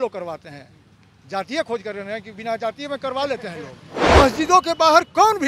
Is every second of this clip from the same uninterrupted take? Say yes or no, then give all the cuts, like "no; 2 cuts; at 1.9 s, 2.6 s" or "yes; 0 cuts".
no; 1 cut; at 4.1 s